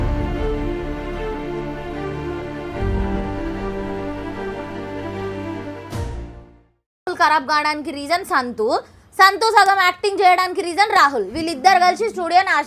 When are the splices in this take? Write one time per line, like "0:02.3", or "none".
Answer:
0:07.1

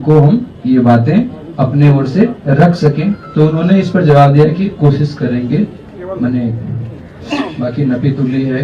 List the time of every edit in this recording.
none

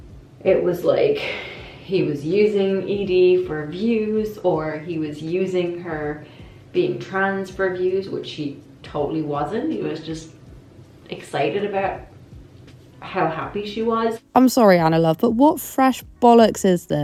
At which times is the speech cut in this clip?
none

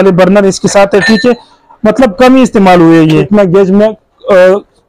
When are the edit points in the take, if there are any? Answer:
0:03.2

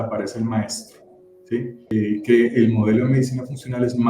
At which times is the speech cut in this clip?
0:01.8

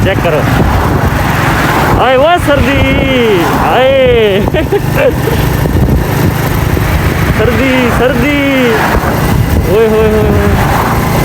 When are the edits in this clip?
none

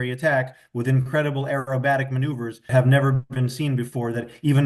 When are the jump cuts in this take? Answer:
none

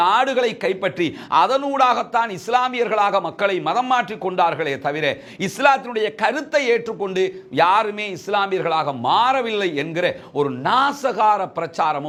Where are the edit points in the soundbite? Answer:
none

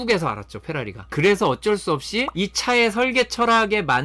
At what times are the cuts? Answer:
0:01.0
0:02.3

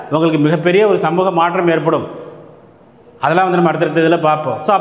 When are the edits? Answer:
none

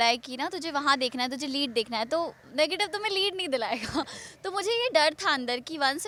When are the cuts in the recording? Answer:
none

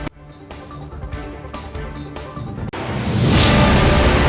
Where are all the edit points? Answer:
none

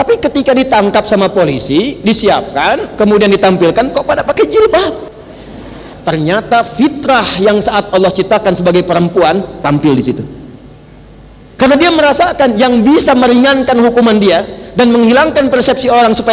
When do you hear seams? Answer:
0:05.9

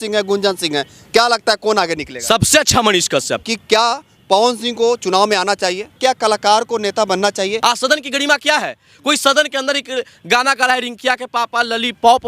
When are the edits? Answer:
0:03.4
0:05.9
0:07.6

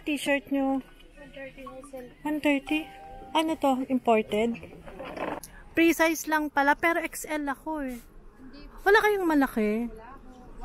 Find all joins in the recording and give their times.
0:05.4

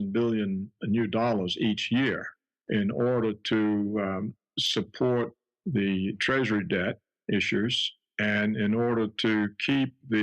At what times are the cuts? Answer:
0:03.7

